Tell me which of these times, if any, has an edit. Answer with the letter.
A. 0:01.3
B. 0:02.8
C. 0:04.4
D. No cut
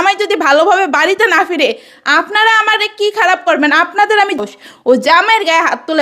C